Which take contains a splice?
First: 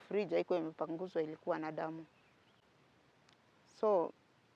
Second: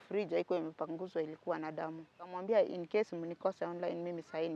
second; 1 cut; at 2.4 s

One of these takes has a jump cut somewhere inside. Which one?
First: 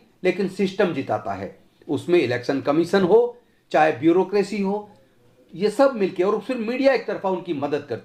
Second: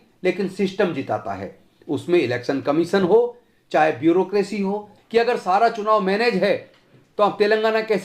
second; 1 cut; at 4.9 s

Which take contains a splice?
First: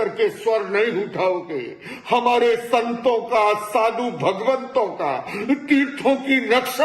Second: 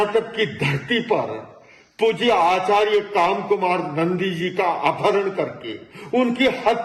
first; 1 cut; at 4.4 s

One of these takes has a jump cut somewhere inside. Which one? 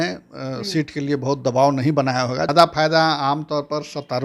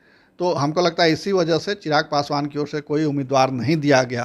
first; 1 cut; at 2.5 s

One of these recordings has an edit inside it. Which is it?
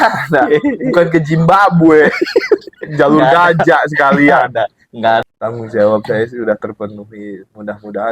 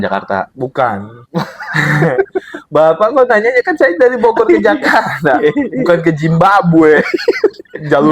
first; 1 cut; at 5.2 s

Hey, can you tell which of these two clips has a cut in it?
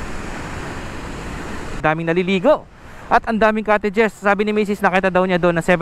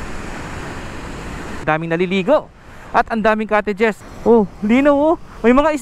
second; 2 cuts; at 1.6 s, 4.0 s

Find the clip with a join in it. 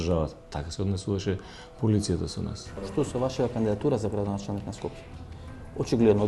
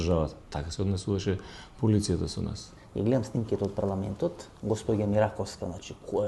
first; 1 cut; at 2.8 s

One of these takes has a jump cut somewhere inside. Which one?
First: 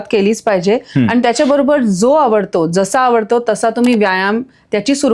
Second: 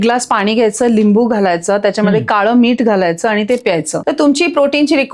second; 1 cut; at 4.0 s

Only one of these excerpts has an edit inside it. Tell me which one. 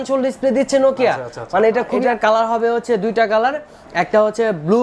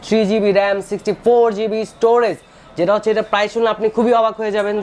first; 1 cut; at 2.0 s

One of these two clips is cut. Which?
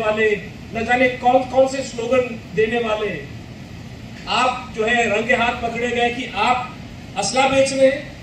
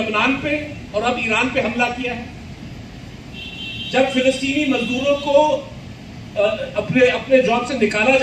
second; 1 cut; at 2.6 s

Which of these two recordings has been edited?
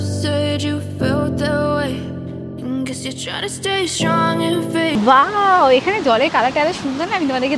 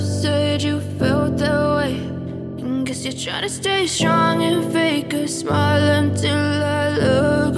second; 1 cut; at 4.9 s

